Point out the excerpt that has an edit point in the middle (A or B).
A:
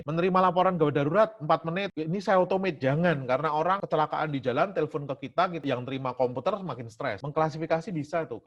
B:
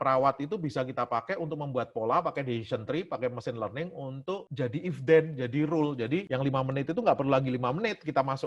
A